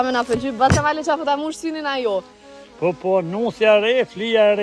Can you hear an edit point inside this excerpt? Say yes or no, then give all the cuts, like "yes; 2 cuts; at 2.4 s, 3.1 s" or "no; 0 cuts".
no; 0 cuts